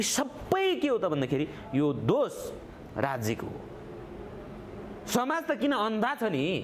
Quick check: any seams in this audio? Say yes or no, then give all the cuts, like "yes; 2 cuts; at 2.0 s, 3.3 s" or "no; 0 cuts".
no; 0 cuts